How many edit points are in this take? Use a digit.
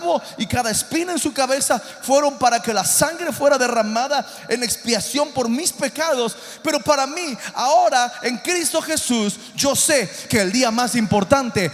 0